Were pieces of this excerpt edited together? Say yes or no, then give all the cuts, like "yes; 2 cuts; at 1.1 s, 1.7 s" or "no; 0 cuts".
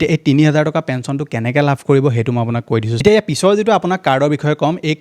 yes; 1 cut; at 2.9 s